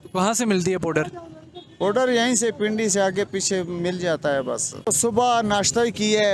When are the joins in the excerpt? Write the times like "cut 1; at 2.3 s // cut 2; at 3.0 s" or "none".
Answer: cut 1; at 4.9 s

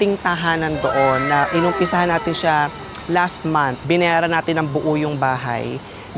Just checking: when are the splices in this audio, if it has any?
cut 1; at 3.8 s

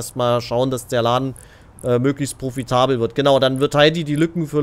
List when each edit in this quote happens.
none

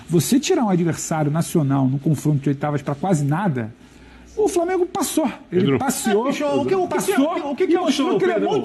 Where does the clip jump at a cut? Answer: none

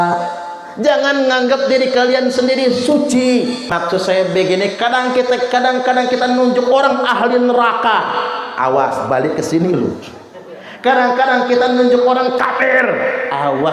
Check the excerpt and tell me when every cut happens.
cut 1; at 3.7 s

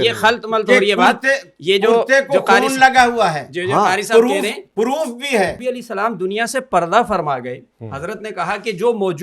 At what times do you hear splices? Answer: cut 1; at 5.6 s

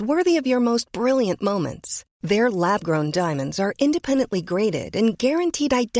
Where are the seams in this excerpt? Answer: none

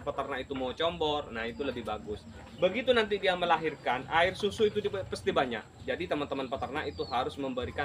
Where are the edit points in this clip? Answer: cut 1; at 2.4 s // cut 2; at 5.7 s

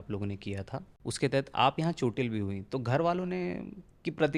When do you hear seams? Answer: cut 1; at 0.9 s

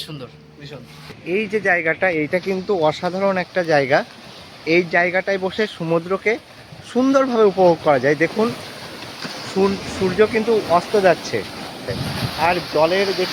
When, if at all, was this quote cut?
cut 1; at 1.2 s // cut 2; at 12.0 s

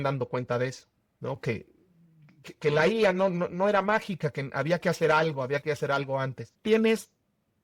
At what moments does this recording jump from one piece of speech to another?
cut 1; at 6.4 s

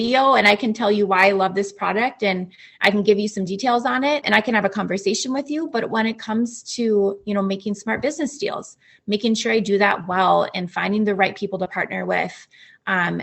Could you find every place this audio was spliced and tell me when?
cut 1; at 4.2 s

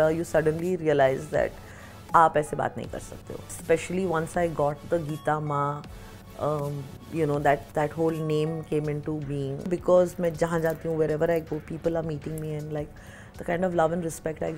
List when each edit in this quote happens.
cut 1; at 3.5 s // cut 2; at 9.7 s

